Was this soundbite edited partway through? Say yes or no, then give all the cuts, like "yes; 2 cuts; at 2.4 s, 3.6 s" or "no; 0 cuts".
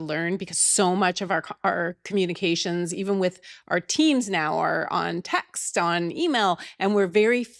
no; 0 cuts